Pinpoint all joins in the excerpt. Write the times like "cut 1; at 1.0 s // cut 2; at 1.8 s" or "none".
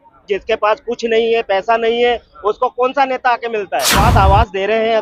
cut 1; at 4.0 s